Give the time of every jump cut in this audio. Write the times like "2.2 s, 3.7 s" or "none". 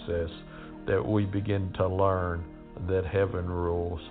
1.7 s

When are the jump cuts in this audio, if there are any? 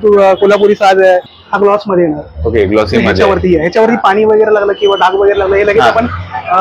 1.2 s

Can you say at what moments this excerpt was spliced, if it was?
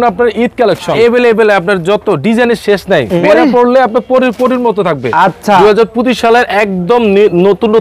1.0 s, 3.2 s, 5.6 s

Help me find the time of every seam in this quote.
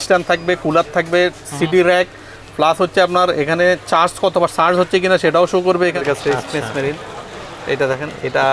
6.0 s

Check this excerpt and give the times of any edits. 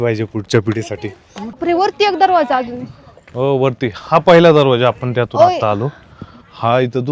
1.6 s

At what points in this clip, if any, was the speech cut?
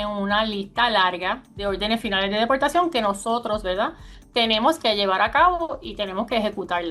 none

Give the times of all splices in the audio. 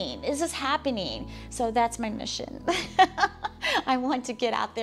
none

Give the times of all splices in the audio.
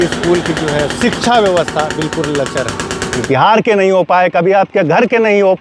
3.2 s

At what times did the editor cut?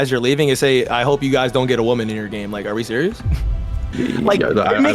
3.8 s

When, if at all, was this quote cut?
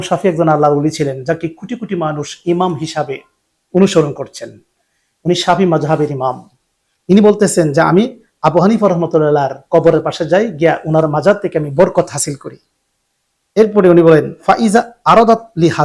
none

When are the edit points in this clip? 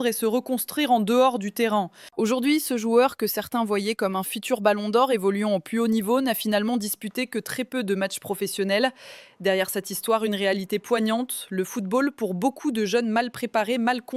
none

